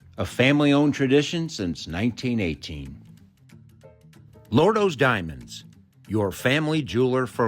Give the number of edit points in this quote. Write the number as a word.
two